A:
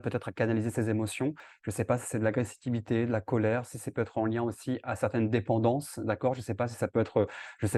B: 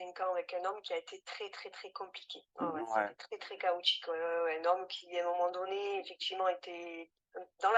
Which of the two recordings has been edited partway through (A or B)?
A